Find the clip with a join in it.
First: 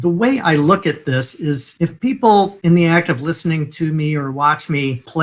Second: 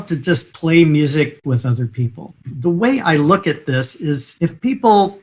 second; 1 cut; at 1.3 s

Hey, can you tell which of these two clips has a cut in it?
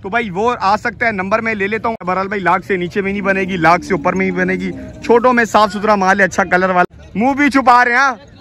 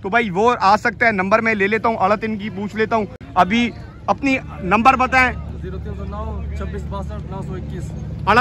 first; 2 cuts; at 2.0 s, 6.9 s

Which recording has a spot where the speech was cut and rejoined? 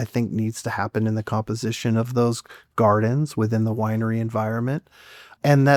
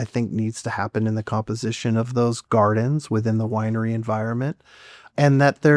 second; 1 cut; at 2.4 s

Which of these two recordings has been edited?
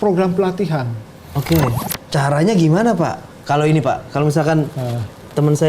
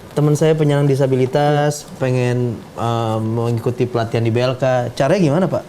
first; 1 cut; at 1.8 s

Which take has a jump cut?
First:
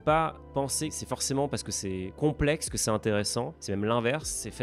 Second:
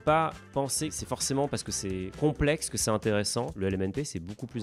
second; 1 cut; at 3.5 s

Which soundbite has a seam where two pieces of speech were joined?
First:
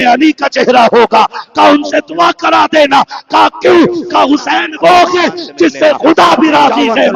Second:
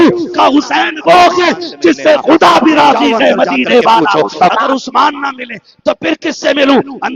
second; 1 cut; at 4.6 s

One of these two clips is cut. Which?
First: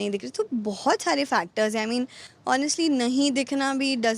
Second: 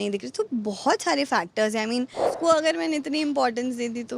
second; 1 cut; at 2.2 s

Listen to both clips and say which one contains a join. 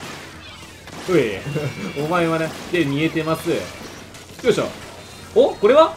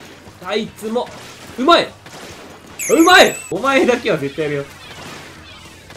second; 1 cut; at 3.5 s

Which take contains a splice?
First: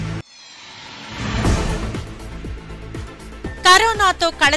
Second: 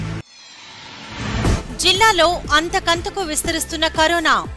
second; 1 cut; at 1.6 s

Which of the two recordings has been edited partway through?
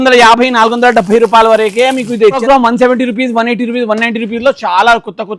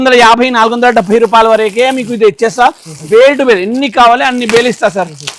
first; 1 cut; at 2.4 s

